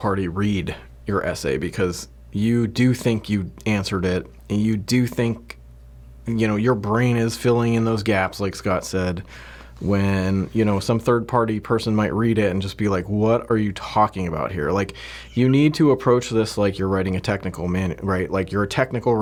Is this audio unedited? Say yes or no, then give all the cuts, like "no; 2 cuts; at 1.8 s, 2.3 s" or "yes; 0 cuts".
yes; 0 cuts